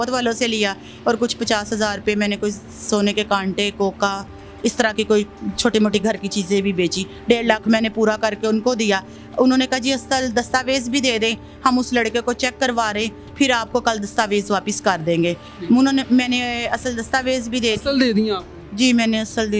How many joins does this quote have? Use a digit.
0